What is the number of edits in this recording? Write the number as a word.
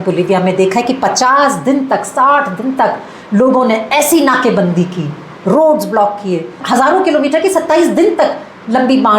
zero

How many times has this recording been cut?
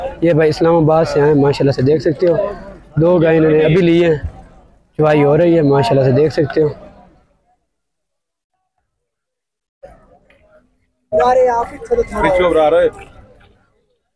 zero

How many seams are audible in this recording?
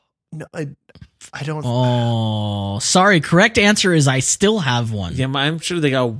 one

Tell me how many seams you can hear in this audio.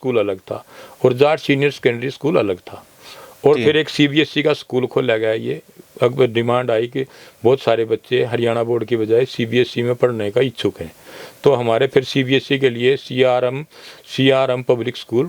zero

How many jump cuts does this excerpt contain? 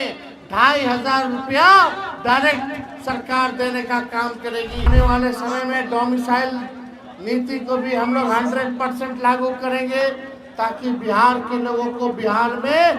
one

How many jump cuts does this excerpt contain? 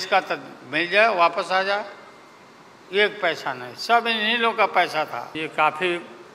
one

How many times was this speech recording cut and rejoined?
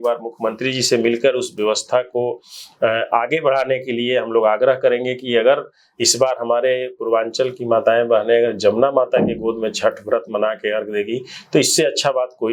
zero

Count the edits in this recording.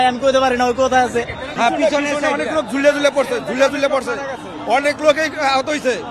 one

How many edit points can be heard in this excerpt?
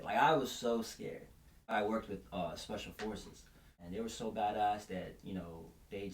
two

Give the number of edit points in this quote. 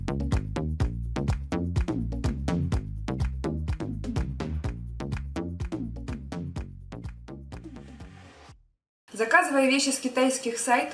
zero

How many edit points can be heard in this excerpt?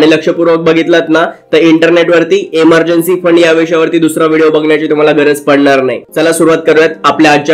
zero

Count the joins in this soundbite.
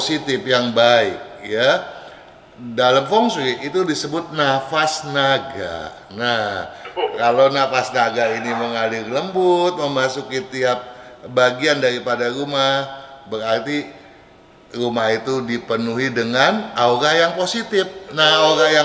zero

